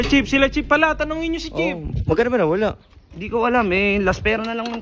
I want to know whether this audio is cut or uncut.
uncut